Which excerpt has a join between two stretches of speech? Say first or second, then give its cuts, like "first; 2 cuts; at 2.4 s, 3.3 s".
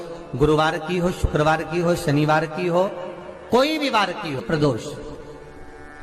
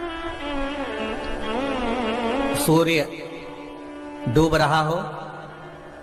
first; 1 cut; at 4.4 s